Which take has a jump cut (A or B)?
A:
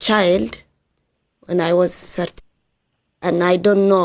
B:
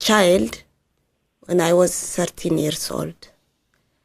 B